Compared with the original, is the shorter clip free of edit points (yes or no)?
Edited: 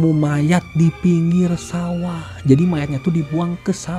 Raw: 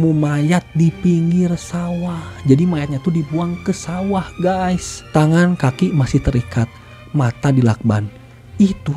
yes